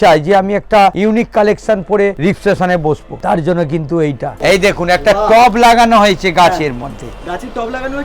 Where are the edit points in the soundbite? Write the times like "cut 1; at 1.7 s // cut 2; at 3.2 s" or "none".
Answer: cut 1; at 1.0 s // cut 2; at 2.2 s // cut 3; at 3.1 s // cut 4; at 4.3 s